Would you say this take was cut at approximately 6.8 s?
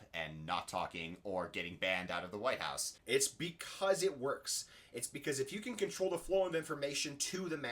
no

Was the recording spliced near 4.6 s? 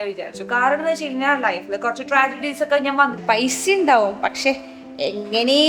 no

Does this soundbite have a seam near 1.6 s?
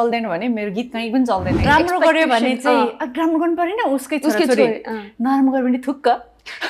yes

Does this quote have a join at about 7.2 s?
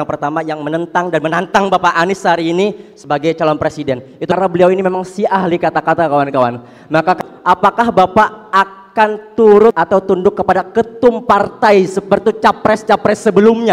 yes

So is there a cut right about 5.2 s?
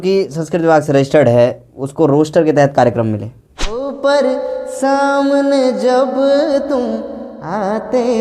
no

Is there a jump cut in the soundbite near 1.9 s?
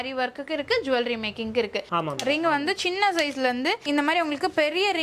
yes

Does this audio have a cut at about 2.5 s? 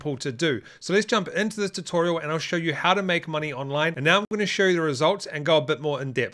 no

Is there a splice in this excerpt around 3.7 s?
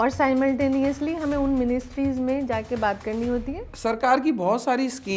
yes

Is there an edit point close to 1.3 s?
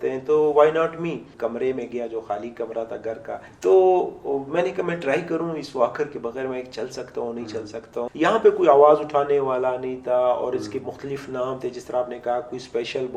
yes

